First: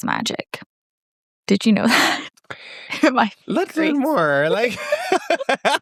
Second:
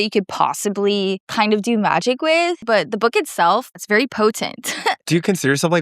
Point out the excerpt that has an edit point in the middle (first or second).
second